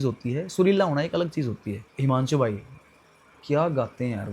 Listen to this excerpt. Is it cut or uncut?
cut